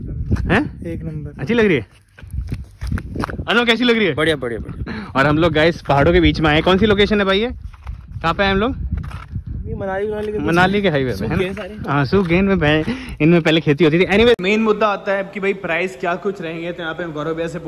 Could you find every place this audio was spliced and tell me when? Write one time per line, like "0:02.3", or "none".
0:14.4